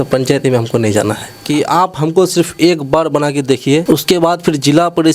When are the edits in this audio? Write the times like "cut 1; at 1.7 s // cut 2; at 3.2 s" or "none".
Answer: cut 1; at 1.3 s // cut 2; at 3.8 s

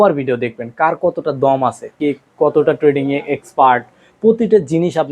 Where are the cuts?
cut 1; at 1.9 s

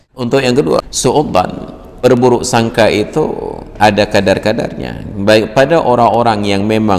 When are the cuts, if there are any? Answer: cut 1; at 0.9 s // cut 2; at 2.0 s

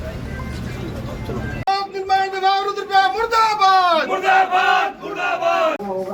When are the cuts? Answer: none

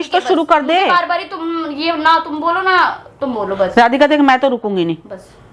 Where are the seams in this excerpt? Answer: none

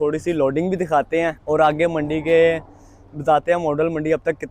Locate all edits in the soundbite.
cut 1; at 1.4 s

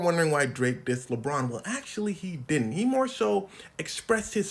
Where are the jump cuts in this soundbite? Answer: none

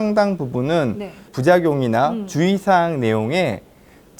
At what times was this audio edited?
cut 1; at 1.3 s

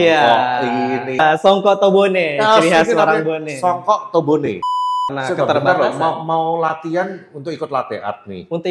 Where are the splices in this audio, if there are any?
cut 1; at 1.2 s // cut 2; at 4.7 s

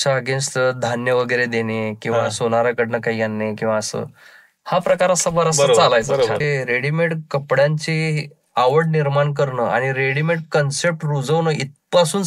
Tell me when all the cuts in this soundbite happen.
cut 1; at 6.4 s

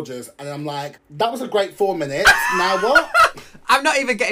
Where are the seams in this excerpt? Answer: cut 1; at 1.0 s

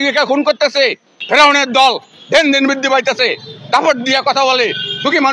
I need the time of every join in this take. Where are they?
cut 1; at 1.1 s

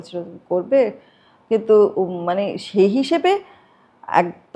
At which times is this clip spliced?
none

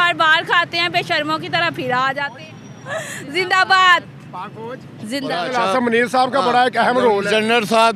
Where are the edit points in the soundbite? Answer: cut 1; at 2.3 s // cut 2; at 5.4 s

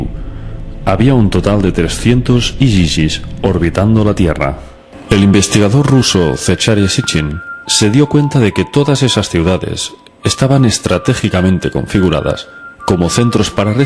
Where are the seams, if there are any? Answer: none

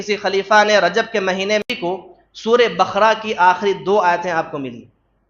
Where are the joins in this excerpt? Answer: cut 1; at 1.6 s

